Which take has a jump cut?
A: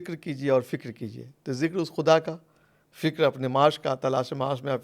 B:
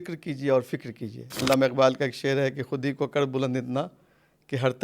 B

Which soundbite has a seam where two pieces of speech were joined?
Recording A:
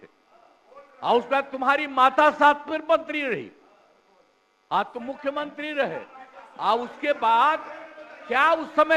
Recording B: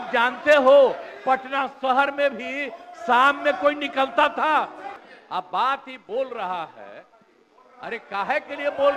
B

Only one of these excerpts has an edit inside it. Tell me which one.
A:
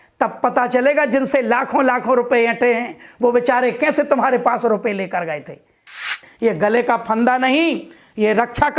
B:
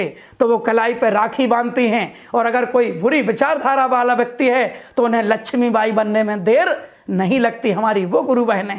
A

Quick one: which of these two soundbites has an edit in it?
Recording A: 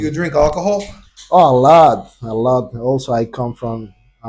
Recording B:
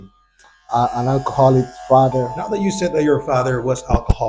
B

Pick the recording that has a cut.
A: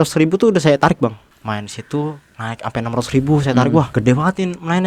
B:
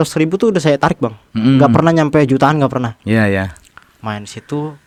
A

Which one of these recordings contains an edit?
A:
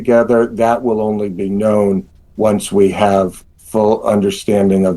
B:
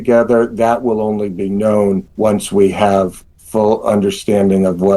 B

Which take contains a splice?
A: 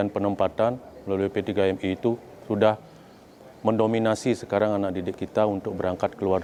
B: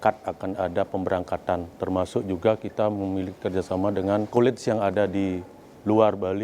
B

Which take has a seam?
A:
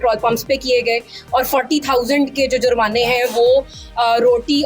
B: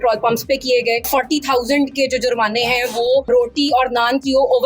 B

